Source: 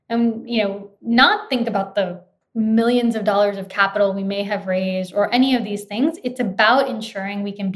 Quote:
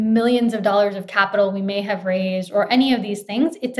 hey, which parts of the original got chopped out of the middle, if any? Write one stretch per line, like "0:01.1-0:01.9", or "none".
none